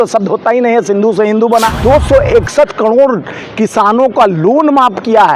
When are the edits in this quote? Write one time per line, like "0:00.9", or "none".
0:01.8

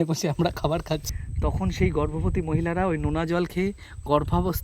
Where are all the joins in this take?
0:01.1

